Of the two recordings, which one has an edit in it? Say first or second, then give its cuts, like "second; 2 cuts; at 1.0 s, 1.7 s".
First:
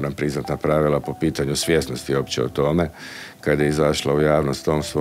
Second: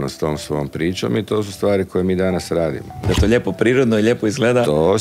second; 1 cut; at 3.1 s